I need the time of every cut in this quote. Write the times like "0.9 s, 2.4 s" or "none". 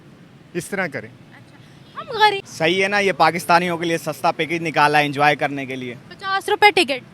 2.5 s